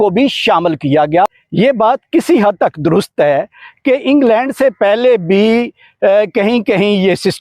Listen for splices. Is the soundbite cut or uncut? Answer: cut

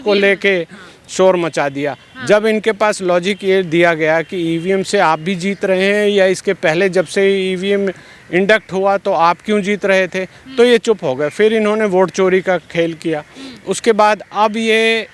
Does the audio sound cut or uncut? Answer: uncut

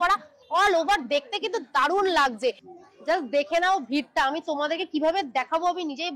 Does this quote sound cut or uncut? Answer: cut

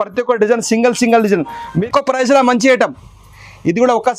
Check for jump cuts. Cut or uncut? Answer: cut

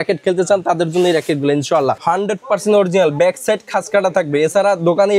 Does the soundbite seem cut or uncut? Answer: cut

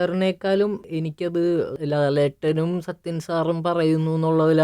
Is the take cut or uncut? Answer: cut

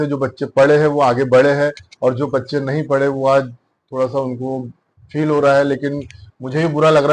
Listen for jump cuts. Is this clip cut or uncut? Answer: uncut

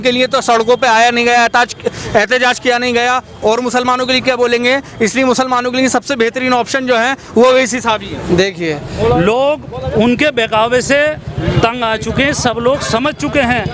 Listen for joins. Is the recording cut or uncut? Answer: cut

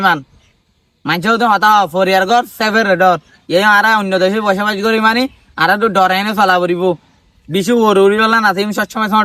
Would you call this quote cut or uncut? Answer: uncut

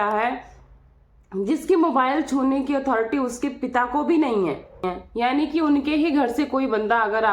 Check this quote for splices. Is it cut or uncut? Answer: cut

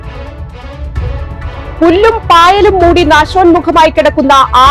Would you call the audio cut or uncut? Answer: cut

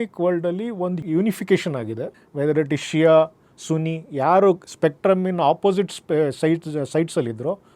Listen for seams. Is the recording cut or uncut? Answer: uncut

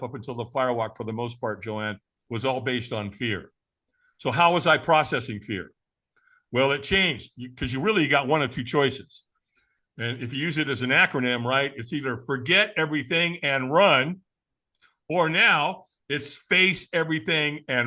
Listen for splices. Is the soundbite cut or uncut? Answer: uncut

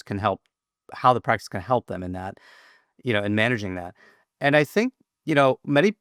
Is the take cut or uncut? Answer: uncut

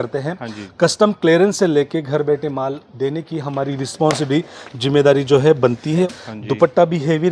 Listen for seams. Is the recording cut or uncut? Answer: cut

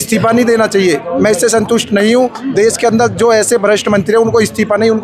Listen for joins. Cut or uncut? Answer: uncut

